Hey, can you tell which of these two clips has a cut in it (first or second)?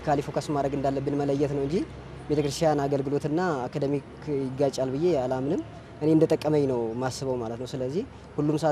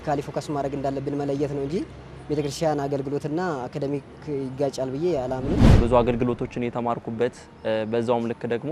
second